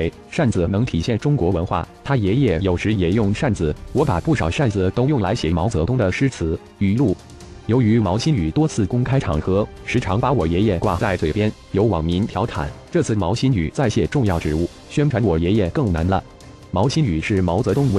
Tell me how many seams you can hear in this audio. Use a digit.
1